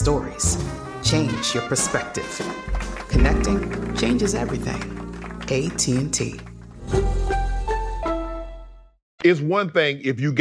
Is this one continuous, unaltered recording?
yes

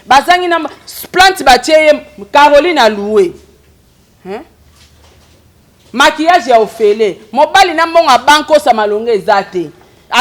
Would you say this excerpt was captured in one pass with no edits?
yes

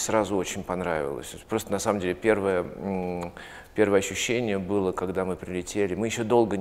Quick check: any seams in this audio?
no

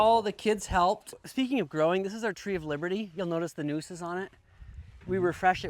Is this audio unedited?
no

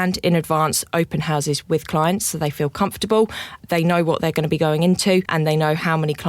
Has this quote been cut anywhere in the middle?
yes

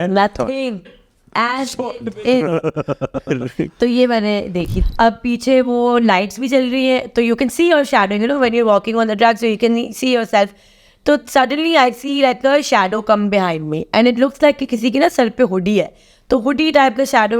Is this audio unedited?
no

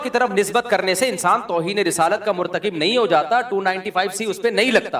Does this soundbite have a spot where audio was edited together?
no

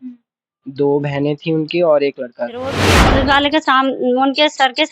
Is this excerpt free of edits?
no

